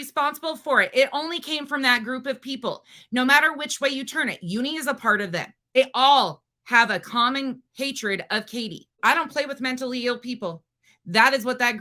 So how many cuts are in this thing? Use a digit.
2